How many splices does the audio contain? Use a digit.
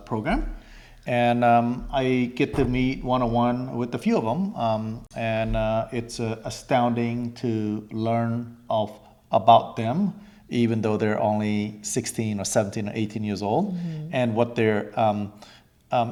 0